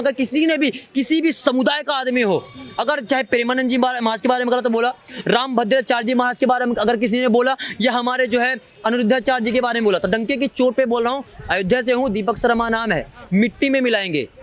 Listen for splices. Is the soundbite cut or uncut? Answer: uncut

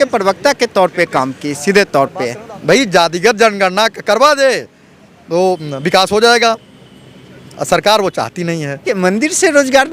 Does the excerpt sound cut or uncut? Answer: cut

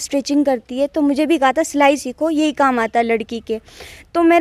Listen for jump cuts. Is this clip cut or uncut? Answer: uncut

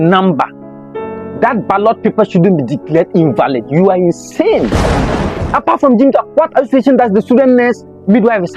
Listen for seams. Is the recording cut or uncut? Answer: cut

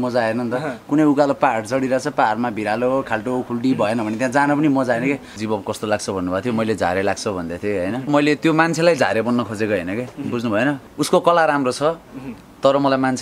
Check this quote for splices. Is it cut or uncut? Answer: cut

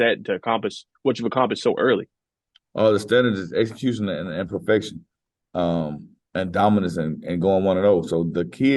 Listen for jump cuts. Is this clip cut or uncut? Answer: uncut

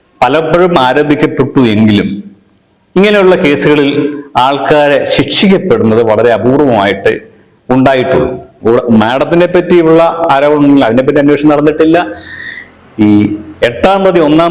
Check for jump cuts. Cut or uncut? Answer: cut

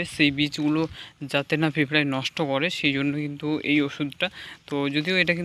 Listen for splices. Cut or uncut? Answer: uncut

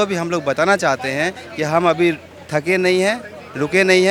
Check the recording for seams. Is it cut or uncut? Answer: uncut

